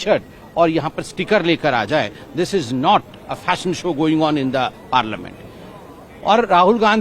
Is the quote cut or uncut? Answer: uncut